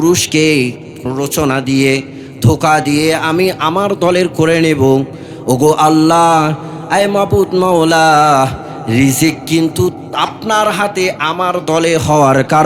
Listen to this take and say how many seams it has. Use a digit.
1